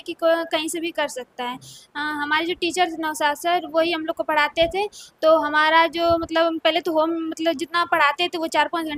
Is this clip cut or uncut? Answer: uncut